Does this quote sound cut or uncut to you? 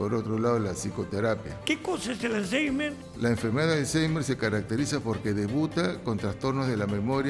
cut